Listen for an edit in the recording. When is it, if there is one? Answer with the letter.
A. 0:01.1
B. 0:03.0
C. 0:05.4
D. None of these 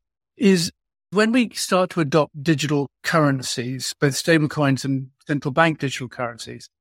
A